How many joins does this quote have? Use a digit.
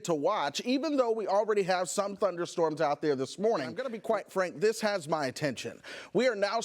1